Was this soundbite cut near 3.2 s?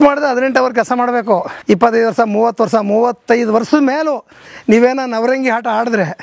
no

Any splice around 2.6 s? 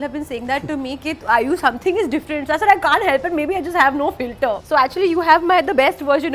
no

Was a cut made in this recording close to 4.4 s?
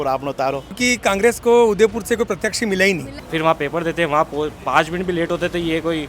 no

